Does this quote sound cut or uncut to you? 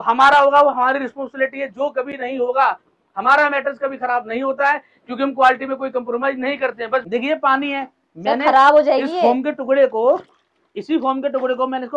cut